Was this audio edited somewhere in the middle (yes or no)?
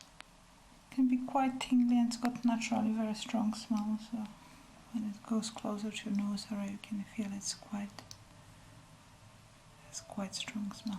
no